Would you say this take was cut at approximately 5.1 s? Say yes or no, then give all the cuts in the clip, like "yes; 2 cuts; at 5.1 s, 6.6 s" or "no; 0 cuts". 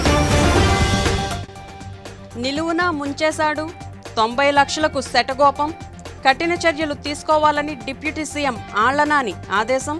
no; 1 cut; at 1.7 s